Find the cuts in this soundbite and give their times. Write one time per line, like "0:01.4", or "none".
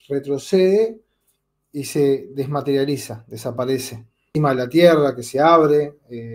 0:04.4